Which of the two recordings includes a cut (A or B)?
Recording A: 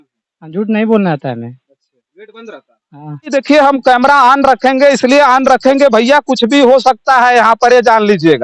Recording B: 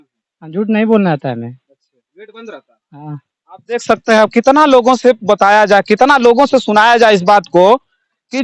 A